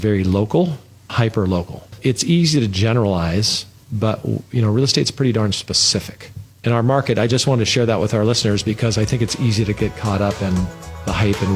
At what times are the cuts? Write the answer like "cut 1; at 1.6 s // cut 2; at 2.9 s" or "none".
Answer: cut 1; at 1.1 s